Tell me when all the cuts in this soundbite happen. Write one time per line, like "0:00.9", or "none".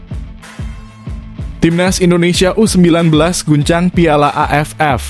0:01.6